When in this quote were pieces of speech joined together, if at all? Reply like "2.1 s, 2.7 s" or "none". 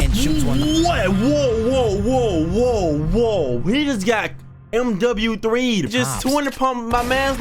5.9 s